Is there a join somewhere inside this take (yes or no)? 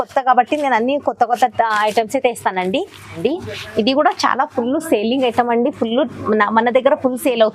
yes